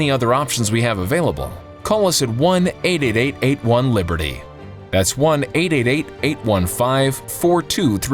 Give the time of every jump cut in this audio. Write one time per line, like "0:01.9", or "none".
none